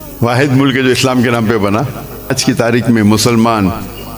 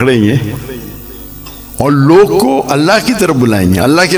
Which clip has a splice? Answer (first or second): first